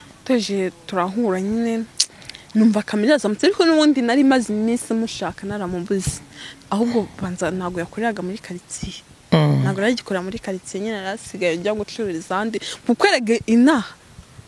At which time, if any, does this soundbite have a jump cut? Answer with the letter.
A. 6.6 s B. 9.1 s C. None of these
C